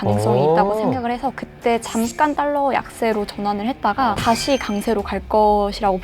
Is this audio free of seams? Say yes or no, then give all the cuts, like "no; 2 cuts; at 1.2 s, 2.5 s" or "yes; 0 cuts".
no; 1 cut; at 4.2 s